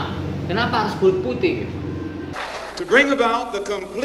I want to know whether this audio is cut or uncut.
cut